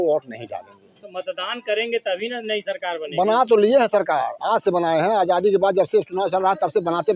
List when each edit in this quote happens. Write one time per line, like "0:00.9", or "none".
none